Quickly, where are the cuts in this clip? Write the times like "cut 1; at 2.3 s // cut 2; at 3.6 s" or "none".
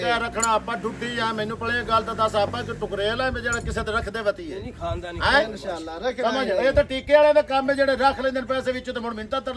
none